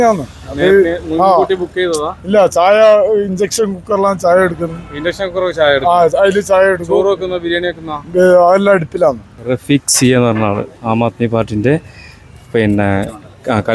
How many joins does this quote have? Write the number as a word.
one